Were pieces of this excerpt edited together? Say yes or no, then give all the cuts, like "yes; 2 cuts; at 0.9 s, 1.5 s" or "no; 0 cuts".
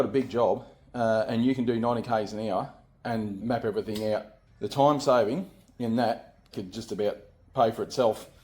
yes; 3 cuts; at 3.4 s, 4.4 s, 6.5 s